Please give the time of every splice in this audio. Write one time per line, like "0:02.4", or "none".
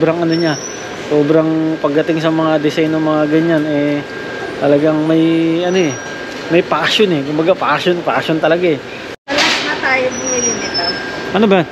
0:09.2